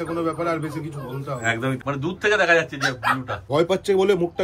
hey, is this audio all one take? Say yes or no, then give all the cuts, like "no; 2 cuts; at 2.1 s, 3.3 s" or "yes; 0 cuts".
no; 2 cuts; at 1.8 s, 3.5 s